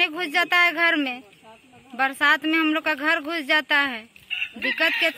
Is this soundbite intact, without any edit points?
yes; 0 cuts

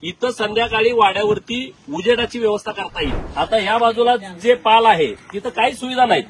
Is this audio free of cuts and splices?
no; 1 cut; at 3.2 s

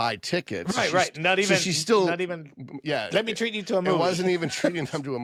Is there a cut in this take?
no; 0 cuts

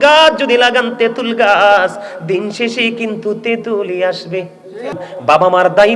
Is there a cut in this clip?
yes; 1 cut; at 4.9 s

